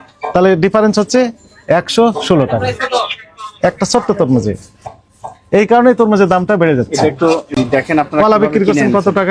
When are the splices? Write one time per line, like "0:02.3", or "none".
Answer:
none